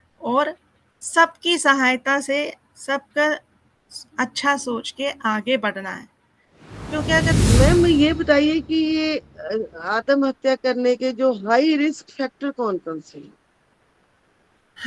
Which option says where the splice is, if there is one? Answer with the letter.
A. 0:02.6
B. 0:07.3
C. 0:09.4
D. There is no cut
B